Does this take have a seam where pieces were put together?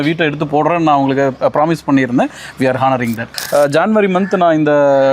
yes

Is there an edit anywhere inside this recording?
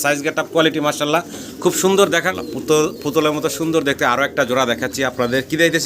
yes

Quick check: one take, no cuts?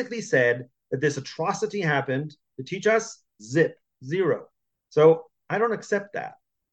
yes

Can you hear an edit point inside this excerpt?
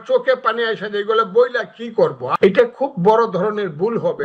yes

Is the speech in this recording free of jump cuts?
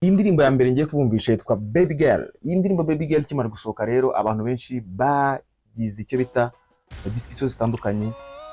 yes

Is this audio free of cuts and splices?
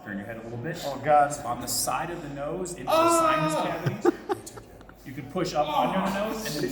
yes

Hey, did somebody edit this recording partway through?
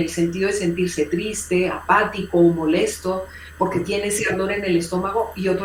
no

